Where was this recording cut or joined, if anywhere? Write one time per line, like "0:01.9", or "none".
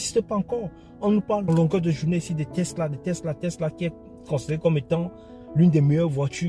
0:01.5